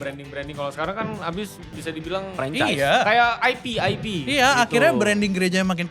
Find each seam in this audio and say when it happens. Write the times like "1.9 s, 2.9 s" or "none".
1.7 s